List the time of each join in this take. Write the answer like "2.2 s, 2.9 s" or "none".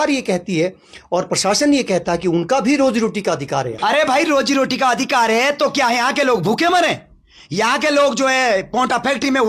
3.7 s